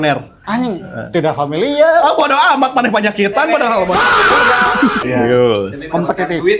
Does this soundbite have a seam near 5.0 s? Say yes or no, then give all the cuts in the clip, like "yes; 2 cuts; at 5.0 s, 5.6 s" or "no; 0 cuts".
yes; 1 cut; at 5.0 s